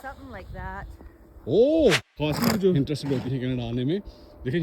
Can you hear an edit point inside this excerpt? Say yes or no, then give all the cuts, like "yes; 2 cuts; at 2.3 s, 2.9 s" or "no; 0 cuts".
yes; 2 cuts; at 2.1 s, 2.8 s